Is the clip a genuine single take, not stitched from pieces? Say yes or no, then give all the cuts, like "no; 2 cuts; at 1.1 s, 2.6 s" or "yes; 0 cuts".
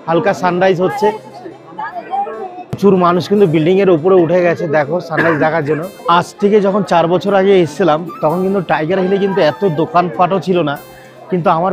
no; 2 cuts; at 2.8 s, 5.9 s